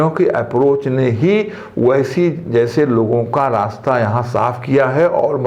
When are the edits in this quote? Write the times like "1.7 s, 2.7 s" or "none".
none